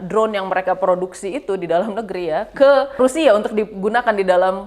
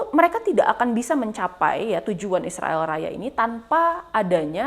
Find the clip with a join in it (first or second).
first